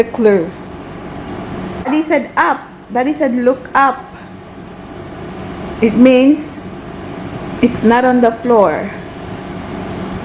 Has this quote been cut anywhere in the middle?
yes; 1 cut; at 1.9 s

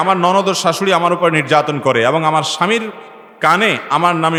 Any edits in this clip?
no; 0 cuts

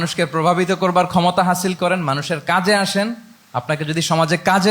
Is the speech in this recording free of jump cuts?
yes; 0 cuts

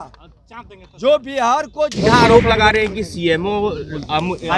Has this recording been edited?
yes; 1 cut; at 1.9 s

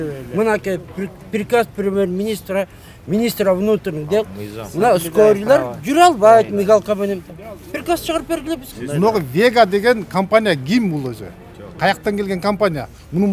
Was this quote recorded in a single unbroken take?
no; 1 cut; at 8.7 s

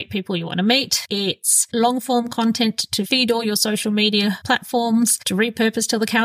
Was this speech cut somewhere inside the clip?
no; 0 cuts

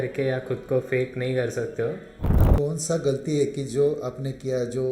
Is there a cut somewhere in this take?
yes; 1 cut; at 2.4 s

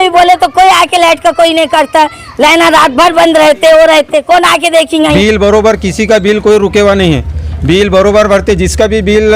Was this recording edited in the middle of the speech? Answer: yes; 1 cut; at 5.1 s

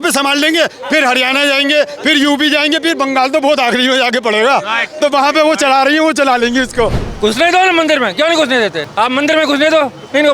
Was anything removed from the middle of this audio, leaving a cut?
yes; 2 cuts; at 7.0 s, 8.8 s

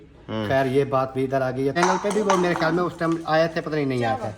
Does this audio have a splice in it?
yes; 1 cut; at 1.7 s

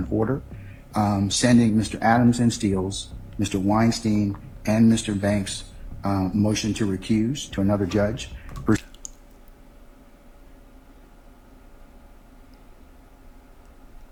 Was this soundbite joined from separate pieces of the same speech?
no; 0 cuts

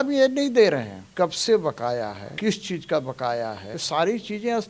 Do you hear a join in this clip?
yes; 3 cuts; at 1.0 s, 2.2 s, 3.7 s

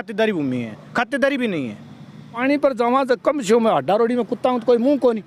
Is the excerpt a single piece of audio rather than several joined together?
no; 1 cut; at 2.4 s

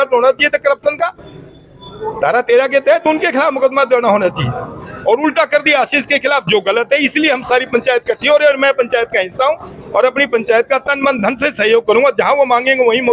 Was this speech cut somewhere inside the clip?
no; 0 cuts

